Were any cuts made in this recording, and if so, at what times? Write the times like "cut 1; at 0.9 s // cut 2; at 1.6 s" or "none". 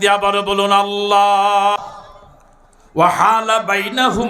cut 1; at 1.8 s